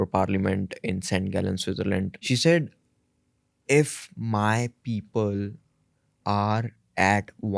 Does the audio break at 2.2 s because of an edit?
yes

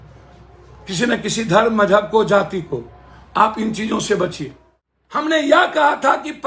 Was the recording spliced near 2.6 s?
no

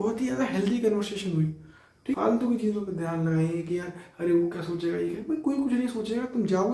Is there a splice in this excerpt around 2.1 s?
yes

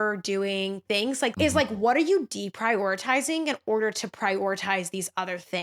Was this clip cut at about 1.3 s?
yes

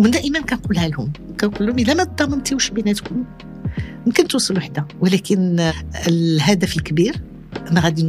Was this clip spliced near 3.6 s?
no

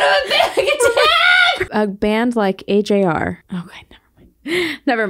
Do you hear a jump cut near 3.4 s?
yes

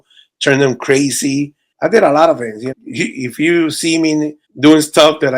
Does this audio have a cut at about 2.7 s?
yes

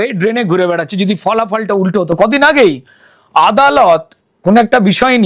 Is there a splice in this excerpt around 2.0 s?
no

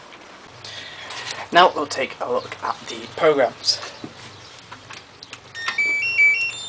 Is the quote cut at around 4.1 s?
no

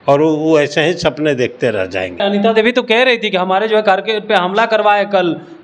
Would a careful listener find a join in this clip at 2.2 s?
yes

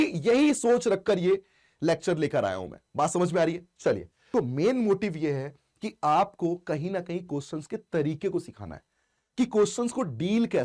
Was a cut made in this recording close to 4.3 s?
yes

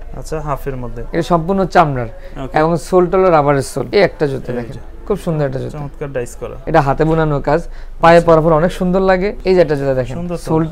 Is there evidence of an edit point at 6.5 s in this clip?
yes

